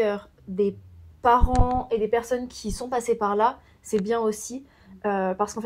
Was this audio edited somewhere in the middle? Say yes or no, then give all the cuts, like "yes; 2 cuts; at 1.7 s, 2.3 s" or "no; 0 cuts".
no; 0 cuts